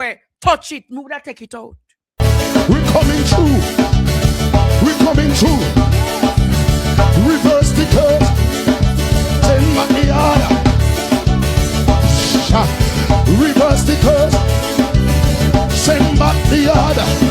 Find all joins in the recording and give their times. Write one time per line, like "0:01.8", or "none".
0:02.0